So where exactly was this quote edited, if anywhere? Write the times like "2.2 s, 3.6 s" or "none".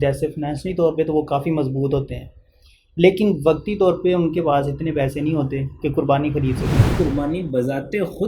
6.9 s

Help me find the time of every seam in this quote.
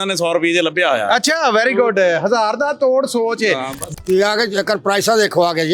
3.8 s

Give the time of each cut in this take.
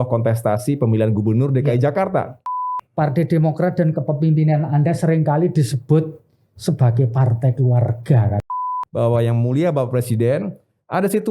2.4 s, 8.5 s

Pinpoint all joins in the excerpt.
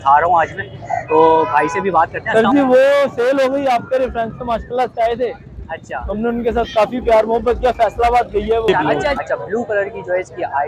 2.2 s, 8.7 s

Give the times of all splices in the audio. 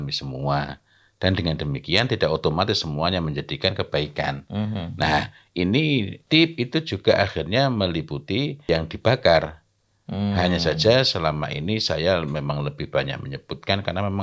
6.2 s, 8.6 s

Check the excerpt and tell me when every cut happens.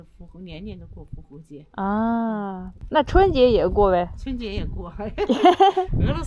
2.6 s

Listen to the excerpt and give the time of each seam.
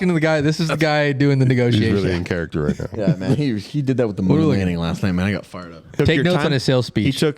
5.8 s

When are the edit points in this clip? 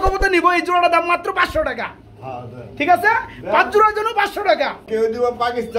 4.8 s

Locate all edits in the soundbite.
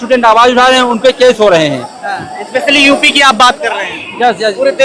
none

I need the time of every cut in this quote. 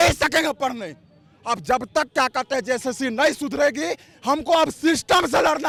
none

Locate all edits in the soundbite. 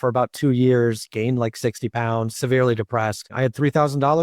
2.3 s, 3.3 s

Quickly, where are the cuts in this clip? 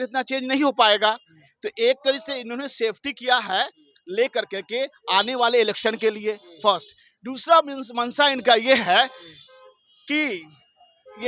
none

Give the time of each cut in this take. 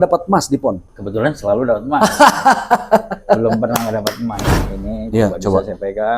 0.9 s, 4.5 s

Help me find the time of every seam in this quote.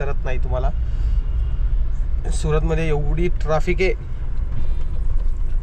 none

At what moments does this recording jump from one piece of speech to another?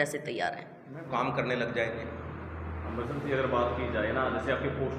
0.9 s

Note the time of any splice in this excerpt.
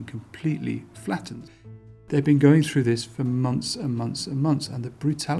1.4 s

